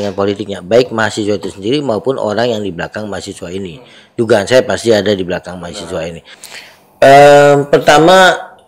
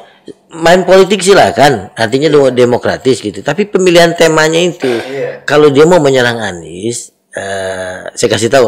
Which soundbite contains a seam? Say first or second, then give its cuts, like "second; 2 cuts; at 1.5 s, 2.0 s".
first; 1 cut; at 6.3 s